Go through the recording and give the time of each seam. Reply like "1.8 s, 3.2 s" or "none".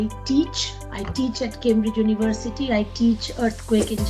none